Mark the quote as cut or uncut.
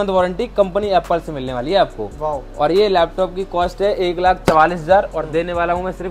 uncut